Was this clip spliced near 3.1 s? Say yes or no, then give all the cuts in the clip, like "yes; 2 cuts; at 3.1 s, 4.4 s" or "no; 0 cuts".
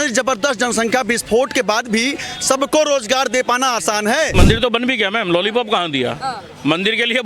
no; 1 cut; at 4.3 s